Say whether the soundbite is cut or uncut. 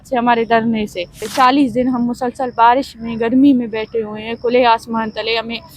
cut